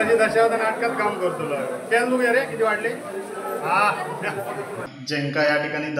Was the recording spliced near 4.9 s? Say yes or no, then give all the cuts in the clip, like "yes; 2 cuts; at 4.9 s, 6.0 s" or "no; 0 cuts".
yes; 1 cut; at 4.9 s